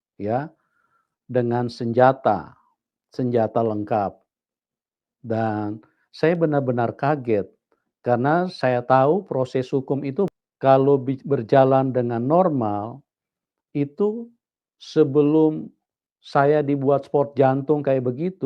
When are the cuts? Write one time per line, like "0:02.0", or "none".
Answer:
0:10.3